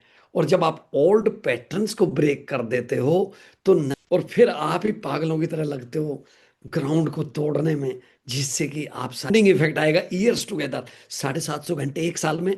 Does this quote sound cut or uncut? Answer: cut